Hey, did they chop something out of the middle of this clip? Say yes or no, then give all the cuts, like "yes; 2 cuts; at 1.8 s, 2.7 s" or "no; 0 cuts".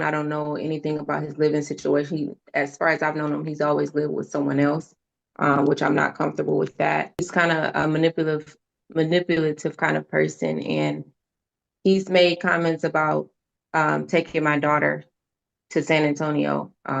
yes; 1 cut; at 7.2 s